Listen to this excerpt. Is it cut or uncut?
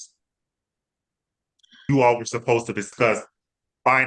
cut